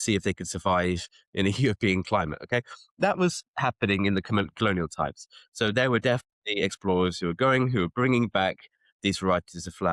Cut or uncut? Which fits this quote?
uncut